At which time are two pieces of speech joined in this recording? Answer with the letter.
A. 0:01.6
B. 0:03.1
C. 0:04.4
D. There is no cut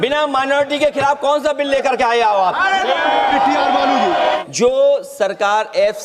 C